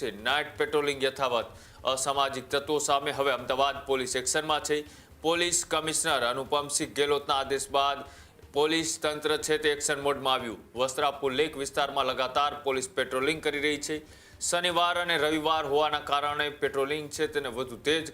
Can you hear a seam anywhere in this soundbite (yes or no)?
no